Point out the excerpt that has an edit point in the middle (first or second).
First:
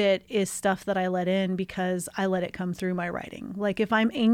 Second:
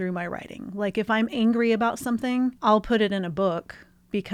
second